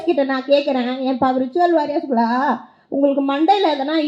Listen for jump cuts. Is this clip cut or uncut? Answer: uncut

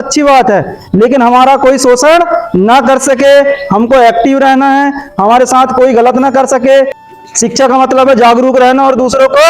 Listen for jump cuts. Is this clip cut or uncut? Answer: cut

